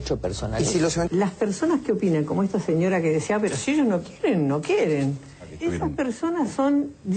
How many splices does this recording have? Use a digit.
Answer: 1